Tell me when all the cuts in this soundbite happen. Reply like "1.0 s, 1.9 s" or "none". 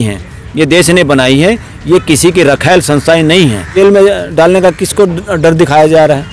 3.7 s